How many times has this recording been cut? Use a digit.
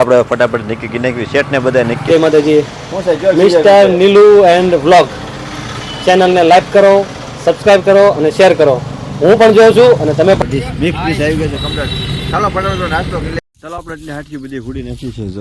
3